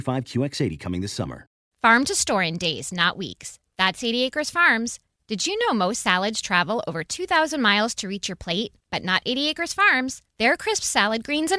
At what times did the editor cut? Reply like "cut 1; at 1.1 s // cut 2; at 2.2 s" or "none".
cut 1; at 1.6 s